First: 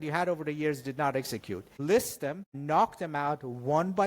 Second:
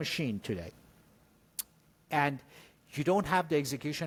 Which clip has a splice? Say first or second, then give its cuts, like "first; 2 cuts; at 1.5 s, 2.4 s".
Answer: first; 2 cuts; at 1.7 s, 2.5 s